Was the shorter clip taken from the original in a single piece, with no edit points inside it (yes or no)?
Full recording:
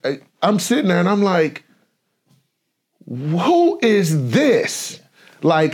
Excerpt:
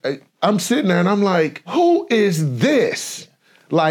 no